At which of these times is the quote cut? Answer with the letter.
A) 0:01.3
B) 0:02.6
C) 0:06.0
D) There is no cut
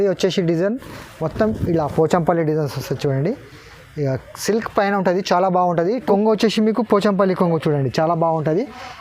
C